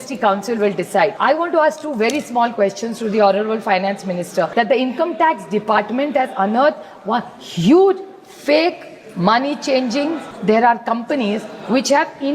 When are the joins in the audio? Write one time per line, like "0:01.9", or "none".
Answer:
0:01.2
0:04.5
0:10.3